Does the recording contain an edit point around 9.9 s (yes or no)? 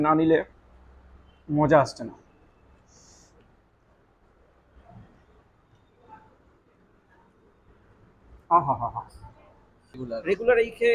yes